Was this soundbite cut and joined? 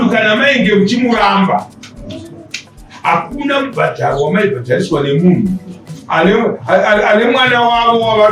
no; 0 cuts

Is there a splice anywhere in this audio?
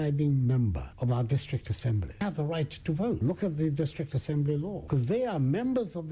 yes; 2 cuts; at 3.2 s, 4.8 s

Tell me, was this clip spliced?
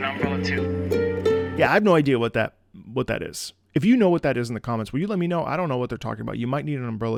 no; 0 cuts

